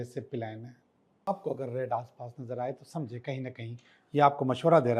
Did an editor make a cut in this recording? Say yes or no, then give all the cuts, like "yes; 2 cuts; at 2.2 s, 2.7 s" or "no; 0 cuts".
yes; 1 cut; at 1.3 s